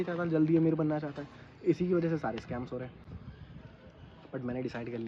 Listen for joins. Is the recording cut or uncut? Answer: uncut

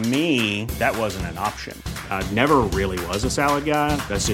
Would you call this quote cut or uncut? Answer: uncut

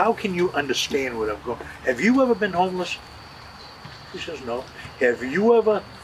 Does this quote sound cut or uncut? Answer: uncut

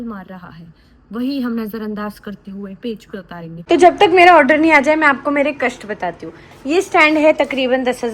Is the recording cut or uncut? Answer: cut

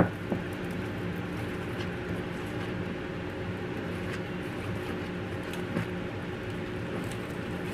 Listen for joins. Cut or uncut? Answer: cut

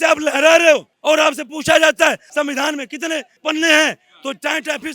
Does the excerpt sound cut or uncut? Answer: cut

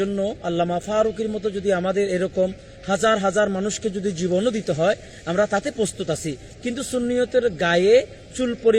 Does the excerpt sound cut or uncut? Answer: uncut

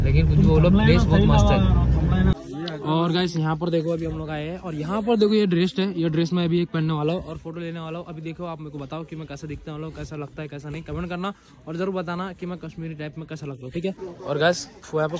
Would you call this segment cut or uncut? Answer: cut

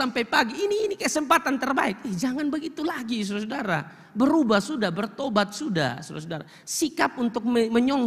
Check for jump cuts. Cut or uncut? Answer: uncut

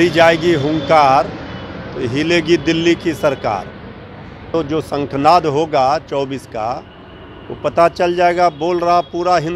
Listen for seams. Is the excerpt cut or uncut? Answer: cut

